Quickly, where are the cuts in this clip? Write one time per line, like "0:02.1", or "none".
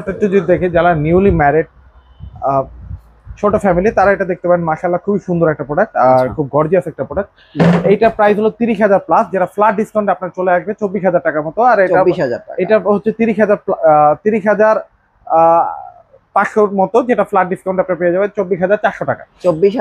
none